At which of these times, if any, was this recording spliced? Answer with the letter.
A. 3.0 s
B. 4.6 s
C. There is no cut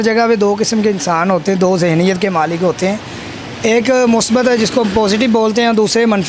C